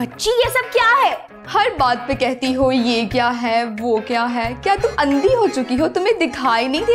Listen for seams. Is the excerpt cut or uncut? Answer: uncut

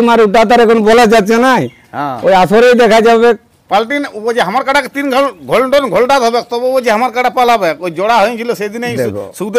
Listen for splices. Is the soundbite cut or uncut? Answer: uncut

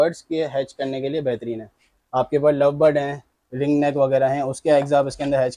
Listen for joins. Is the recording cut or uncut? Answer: uncut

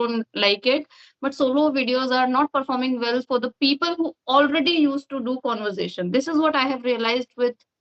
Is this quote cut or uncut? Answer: uncut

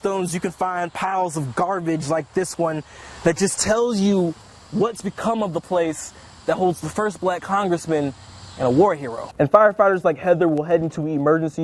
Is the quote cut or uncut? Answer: cut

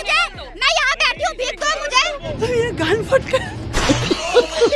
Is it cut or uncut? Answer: cut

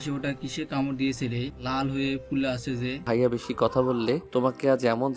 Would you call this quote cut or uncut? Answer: cut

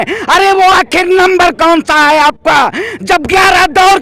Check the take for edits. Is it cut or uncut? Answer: uncut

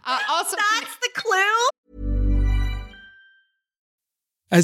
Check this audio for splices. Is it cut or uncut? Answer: cut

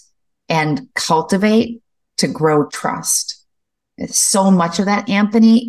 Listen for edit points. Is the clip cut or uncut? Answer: cut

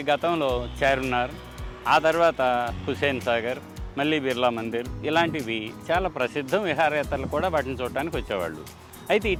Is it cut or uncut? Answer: uncut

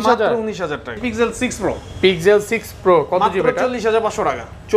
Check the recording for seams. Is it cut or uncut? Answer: cut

